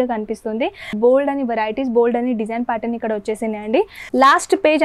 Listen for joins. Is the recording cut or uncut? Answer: cut